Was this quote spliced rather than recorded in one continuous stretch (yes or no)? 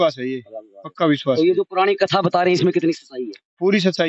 no